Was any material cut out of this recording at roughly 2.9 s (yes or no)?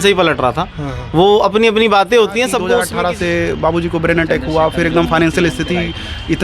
yes